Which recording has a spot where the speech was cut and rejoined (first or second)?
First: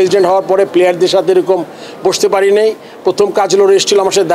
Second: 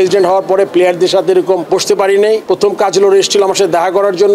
second